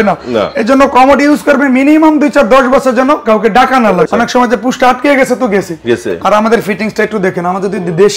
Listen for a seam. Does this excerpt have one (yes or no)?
yes